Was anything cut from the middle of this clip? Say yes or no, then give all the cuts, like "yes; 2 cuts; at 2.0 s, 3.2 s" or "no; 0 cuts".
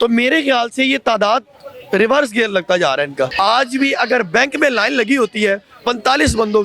yes; 1 cut; at 3.3 s